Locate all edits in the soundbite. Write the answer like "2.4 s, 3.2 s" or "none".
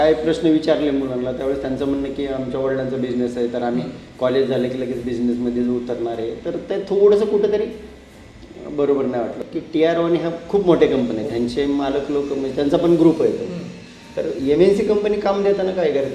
9.4 s